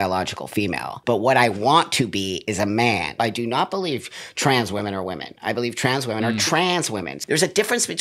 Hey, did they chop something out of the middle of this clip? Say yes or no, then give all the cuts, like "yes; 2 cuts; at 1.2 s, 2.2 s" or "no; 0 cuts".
yes; 3 cuts; at 0.9 s, 3.2 s, 7.1 s